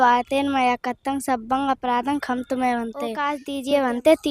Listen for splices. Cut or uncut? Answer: cut